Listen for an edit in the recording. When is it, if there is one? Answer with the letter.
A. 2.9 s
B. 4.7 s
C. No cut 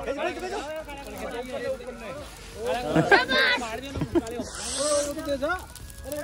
C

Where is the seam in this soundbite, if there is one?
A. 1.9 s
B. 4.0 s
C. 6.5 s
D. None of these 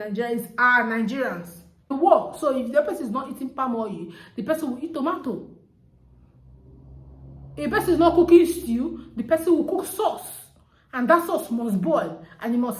A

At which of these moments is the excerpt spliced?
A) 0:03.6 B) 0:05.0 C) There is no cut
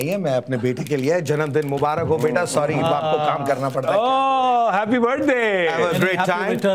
C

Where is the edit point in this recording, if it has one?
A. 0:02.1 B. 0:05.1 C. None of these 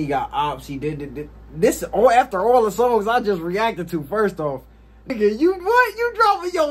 B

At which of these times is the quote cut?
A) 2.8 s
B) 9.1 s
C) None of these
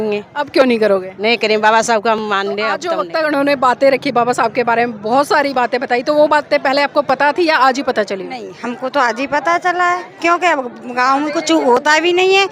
A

